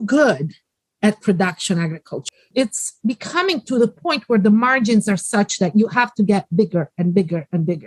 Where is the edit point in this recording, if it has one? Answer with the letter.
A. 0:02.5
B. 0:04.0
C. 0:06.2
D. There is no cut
A